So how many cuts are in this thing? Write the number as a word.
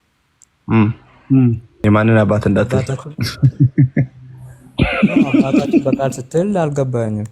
one